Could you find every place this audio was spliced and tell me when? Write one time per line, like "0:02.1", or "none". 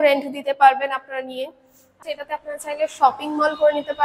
0:02.1